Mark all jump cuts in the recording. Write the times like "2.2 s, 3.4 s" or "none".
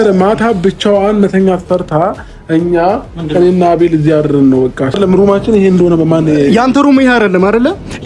4.9 s